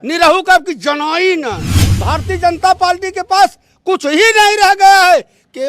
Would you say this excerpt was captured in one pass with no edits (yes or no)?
no